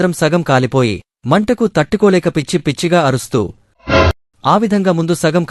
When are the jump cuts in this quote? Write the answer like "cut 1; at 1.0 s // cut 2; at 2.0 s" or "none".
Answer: cut 1; at 4.1 s